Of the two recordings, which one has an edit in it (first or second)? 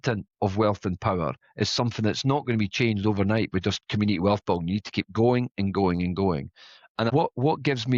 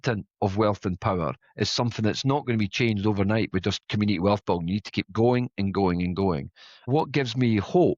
second